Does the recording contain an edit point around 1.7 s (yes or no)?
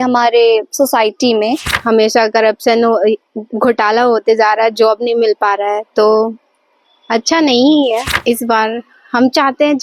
yes